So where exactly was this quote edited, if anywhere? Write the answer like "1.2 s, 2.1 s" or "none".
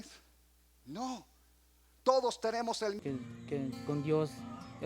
3.0 s